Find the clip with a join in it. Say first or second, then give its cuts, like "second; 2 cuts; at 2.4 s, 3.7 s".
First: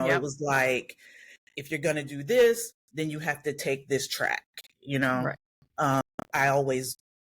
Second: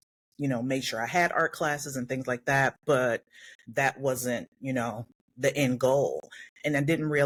first; 1 cut; at 6.0 s